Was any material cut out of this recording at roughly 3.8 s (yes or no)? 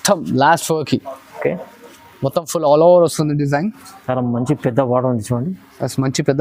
no